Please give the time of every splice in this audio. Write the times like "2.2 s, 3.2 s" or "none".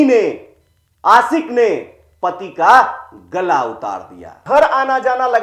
4.4 s